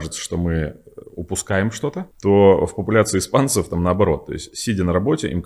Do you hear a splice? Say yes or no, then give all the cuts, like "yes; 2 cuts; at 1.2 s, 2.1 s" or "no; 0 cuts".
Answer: yes; 1 cut; at 2.1 s